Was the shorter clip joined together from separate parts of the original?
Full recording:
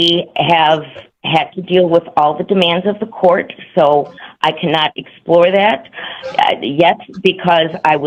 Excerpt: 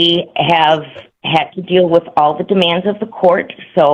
no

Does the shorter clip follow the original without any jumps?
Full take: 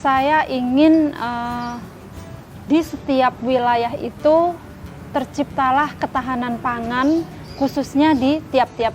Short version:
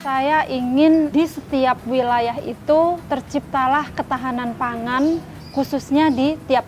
no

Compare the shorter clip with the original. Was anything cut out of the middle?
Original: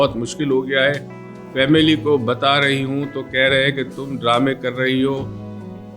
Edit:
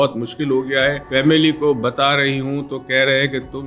yes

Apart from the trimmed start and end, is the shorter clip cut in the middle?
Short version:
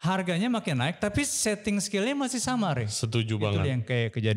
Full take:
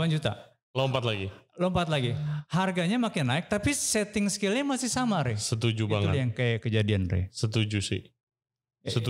no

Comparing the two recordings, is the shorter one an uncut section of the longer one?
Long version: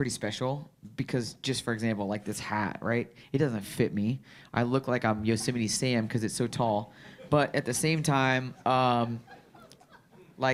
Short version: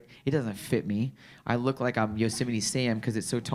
yes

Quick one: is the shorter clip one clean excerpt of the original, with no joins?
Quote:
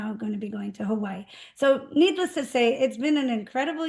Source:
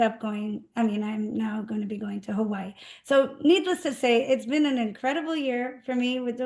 yes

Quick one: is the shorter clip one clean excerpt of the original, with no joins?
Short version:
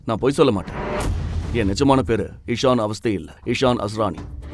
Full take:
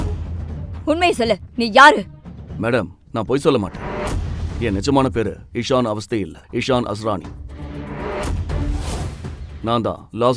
yes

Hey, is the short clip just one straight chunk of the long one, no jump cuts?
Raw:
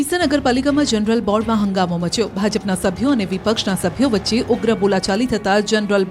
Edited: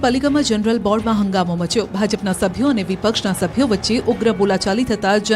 yes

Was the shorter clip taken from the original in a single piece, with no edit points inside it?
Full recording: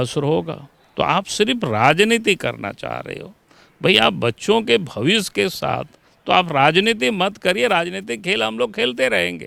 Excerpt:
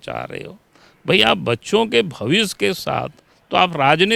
yes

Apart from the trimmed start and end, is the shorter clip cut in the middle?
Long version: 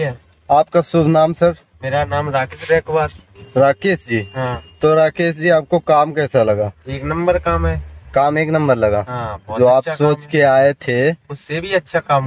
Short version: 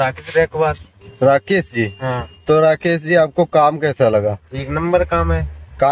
no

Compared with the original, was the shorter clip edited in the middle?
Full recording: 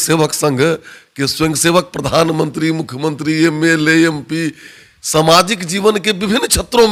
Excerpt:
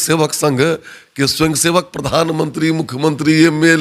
no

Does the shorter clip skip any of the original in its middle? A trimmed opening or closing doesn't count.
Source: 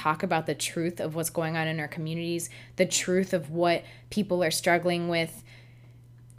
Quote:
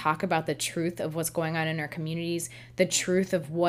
no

